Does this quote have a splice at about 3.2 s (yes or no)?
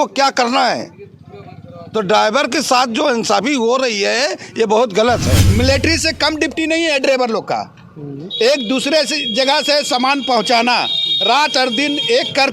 no